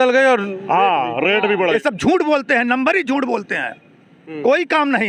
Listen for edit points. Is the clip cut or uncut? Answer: cut